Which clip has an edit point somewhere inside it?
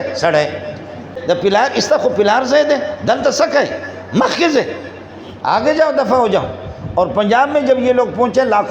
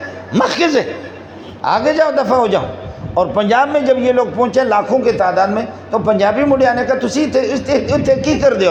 first; 1 cut; at 1.1 s

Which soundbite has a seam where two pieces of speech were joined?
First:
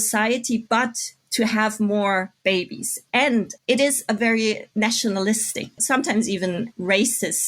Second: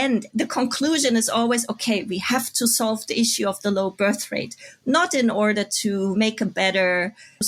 first; 3 cuts; at 3.5 s, 4.6 s, 5.8 s

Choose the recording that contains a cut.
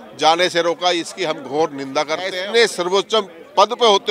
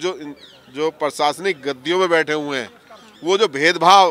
first; 1 cut; at 2.4 s

